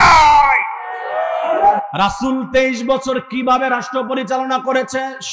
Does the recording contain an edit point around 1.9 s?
yes; 1 cut; at 1.9 s

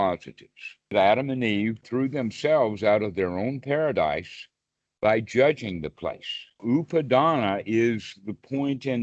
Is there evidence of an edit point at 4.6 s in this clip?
no; 3 cuts; at 0.9 s, 1.9 s, 6.6 s

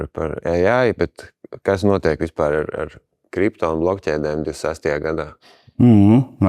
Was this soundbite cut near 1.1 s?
no; 0 cuts

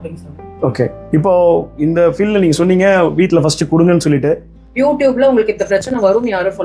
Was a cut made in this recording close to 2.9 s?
no; 1 cut; at 4.6 s

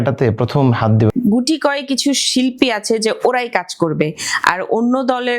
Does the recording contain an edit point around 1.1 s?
yes; 1 cut; at 1.1 s

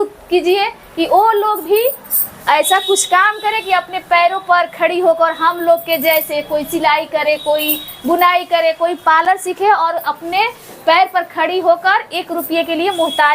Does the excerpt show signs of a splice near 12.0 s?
no; 0 cuts

